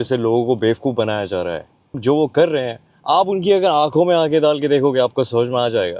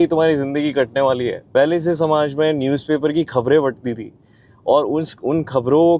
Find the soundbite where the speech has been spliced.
first; 1 cut; at 2.0 s

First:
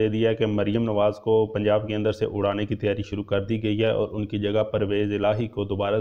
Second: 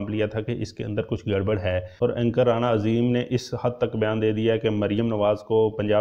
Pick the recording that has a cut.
second; 1 cut; at 1.9 s

